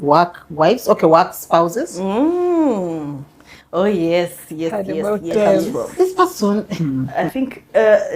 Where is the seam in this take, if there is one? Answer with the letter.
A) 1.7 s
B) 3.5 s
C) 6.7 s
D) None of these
C